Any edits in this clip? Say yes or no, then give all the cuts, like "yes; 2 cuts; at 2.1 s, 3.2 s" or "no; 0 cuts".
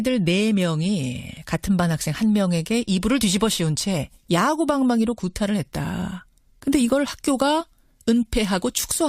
no; 0 cuts